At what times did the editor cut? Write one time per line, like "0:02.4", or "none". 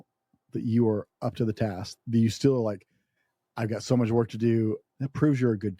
0:01.9
0:04.9